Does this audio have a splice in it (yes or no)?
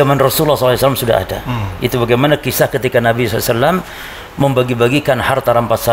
no